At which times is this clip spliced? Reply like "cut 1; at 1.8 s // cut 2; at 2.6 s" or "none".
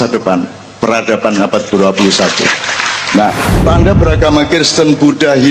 cut 1; at 3.6 s